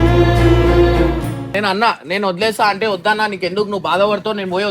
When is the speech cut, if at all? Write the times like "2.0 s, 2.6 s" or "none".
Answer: 1.5 s